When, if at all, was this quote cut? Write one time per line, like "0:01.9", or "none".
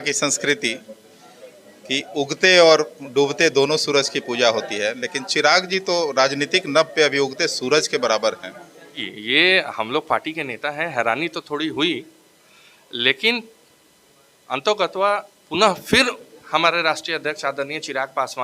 0:09.1